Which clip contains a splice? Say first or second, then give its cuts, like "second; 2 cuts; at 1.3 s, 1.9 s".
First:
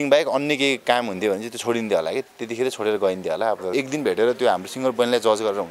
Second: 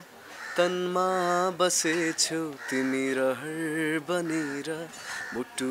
first; 1 cut; at 3.7 s